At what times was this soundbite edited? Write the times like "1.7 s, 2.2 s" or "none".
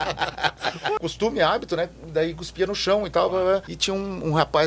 1.0 s, 3.7 s